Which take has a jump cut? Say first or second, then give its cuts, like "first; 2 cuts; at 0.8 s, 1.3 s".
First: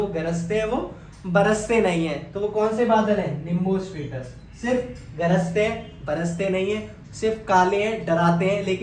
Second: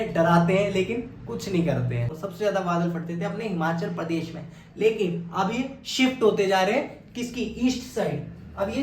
second; 1 cut; at 2.1 s